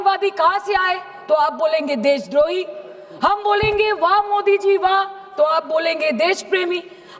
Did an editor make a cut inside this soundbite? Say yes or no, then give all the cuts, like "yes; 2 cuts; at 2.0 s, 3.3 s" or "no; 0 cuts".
no; 0 cuts